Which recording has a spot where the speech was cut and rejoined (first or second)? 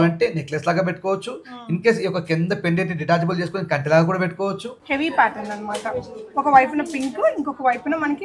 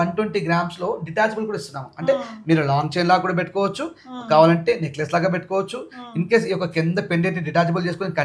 first